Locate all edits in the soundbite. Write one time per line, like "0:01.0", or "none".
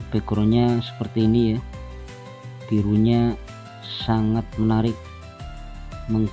none

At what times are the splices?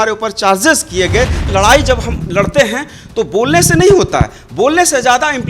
0:01.5

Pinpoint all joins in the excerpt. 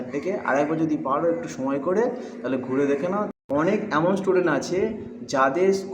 0:03.3

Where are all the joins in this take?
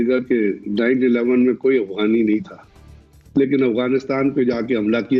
none

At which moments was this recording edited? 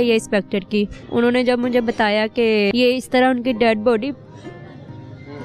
0:01.0
0:02.7

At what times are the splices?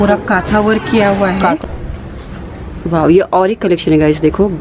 0:01.6

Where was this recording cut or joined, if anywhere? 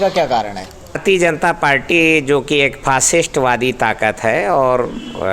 0:01.0

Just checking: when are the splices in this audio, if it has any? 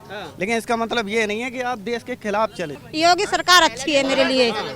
0:02.8

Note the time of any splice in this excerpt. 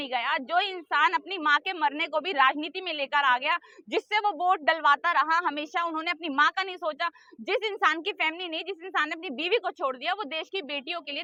none

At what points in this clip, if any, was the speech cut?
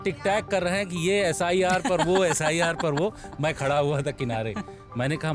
none

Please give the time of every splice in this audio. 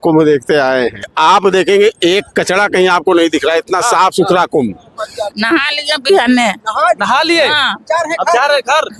0:01.1
0:05.2

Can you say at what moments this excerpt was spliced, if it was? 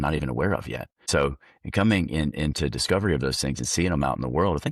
0:01.0

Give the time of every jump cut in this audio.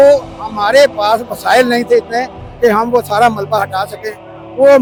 none

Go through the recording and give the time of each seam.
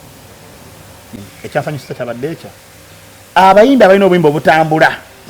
0:01.1

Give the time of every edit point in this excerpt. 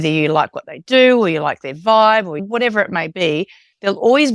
0:02.4

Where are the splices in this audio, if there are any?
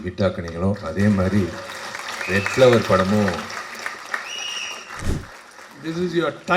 0:05.0

